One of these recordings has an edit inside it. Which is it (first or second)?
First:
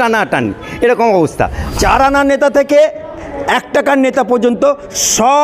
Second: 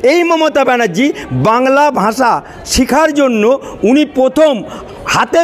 first